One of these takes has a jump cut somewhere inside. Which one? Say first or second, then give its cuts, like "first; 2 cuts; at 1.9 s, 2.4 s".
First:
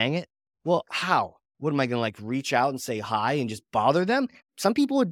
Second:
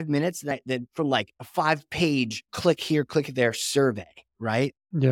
second; 2 cuts; at 1.4 s, 2.5 s